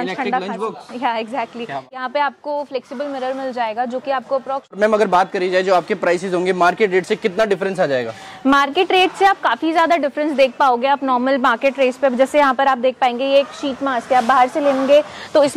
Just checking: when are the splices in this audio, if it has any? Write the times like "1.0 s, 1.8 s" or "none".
2.0 s, 4.8 s